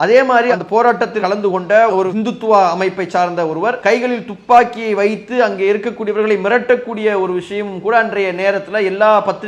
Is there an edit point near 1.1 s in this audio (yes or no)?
yes